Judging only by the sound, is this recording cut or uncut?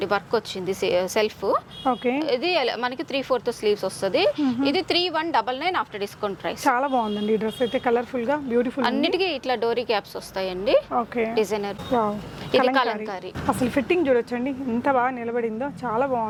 uncut